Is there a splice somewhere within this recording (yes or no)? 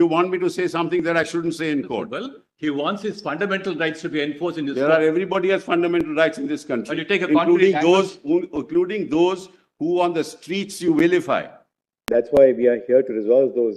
yes